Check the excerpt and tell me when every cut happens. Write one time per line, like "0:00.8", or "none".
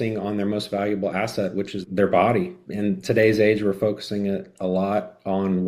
0:01.8
0:02.6